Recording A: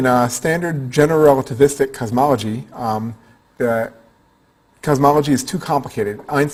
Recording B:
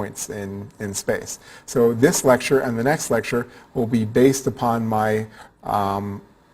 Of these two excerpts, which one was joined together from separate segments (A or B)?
B